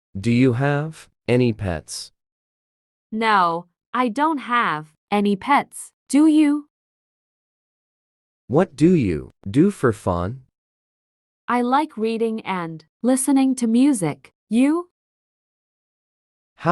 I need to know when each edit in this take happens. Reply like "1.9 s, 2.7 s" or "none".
1.0 s